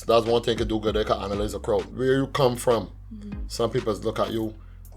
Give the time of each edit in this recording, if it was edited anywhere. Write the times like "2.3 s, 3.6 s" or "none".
1.9 s